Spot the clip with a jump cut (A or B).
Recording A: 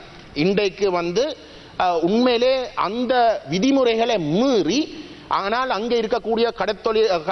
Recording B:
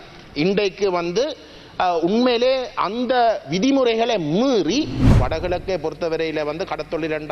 B